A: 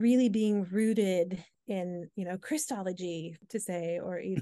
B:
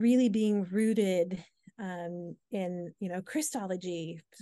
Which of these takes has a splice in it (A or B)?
A